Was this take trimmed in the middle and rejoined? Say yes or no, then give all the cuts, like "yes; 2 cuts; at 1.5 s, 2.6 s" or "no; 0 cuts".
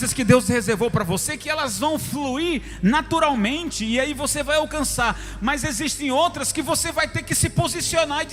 no; 0 cuts